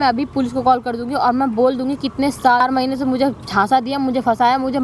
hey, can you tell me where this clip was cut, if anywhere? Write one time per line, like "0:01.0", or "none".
0:02.6